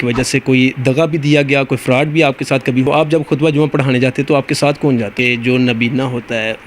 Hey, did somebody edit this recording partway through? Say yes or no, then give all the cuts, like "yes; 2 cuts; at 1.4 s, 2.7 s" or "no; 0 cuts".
yes; 2 cuts; at 2.8 s, 5.1 s